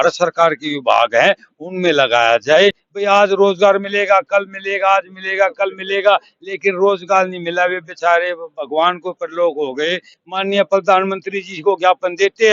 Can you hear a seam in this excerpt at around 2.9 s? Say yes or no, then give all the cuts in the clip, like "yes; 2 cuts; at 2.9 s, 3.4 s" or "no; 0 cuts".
yes; 2 cuts; at 2.9 s, 10.2 s